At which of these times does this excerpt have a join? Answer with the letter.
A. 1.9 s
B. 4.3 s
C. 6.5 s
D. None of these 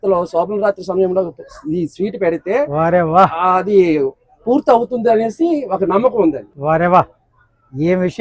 C